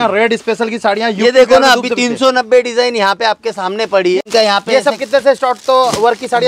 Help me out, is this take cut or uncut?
cut